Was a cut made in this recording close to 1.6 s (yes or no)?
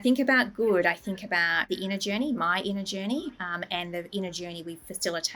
yes